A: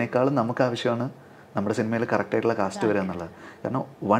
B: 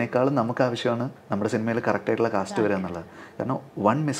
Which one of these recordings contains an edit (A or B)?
B